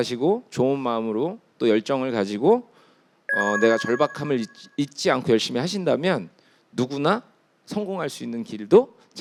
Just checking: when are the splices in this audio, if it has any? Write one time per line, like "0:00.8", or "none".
none